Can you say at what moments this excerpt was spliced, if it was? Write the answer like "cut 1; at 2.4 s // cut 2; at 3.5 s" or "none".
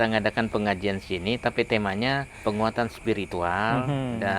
cut 1; at 2.3 s